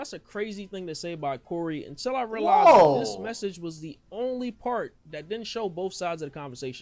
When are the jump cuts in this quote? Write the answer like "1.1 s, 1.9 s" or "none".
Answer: none